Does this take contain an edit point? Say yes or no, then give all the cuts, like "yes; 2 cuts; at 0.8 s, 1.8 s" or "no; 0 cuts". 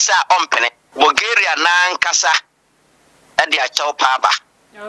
yes; 1 cut; at 0.9 s